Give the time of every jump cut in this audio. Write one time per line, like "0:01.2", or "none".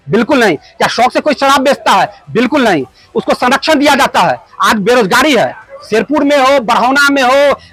none